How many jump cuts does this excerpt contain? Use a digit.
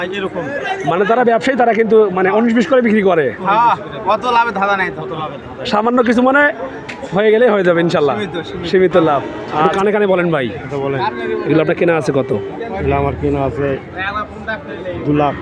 1